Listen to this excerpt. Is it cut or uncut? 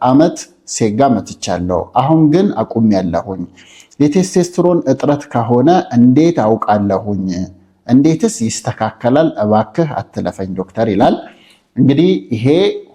uncut